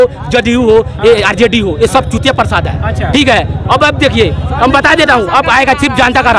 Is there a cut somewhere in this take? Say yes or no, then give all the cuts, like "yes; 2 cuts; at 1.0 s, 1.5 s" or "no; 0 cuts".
no; 0 cuts